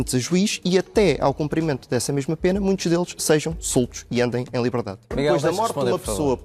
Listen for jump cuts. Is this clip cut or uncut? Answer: cut